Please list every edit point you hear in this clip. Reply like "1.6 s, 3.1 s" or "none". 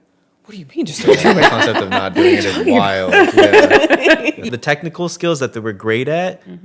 4.5 s